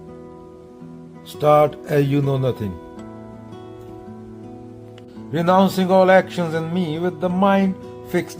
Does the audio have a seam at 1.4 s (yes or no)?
yes